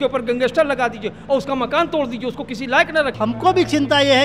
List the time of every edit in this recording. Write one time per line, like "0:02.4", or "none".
0:03.2